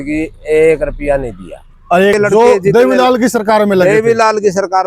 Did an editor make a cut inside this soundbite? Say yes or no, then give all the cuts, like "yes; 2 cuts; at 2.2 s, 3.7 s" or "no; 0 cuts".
yes; 1 cut; at 2.1 s